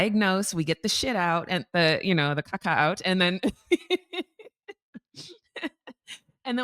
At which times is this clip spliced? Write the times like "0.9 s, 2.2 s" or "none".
1.7 s